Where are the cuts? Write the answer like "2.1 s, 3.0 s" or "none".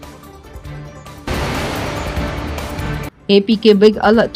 none

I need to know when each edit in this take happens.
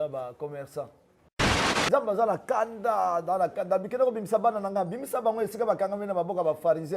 1.6 s

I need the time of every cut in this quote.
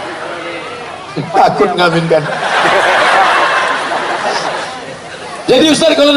4.7 s

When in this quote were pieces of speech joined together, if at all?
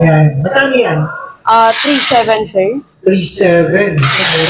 none

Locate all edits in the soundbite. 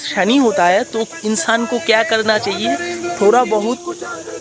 none

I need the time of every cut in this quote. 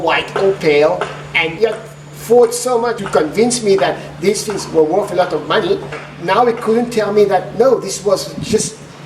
1.5 s, 3.0 s, 6.1 s

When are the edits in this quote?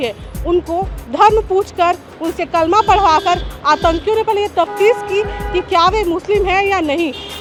none

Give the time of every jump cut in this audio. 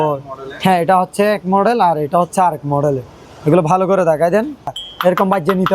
4.8 s

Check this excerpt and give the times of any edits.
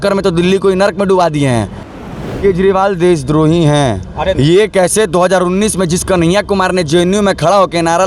2.2 s

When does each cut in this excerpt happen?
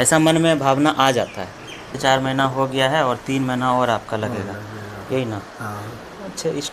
1.9 s

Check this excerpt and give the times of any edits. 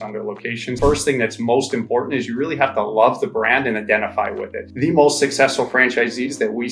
0.8 s, 4.6 s

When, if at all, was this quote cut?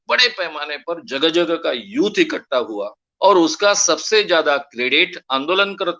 3.0 s

